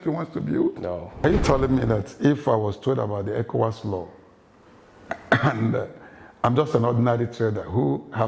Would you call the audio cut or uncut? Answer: cut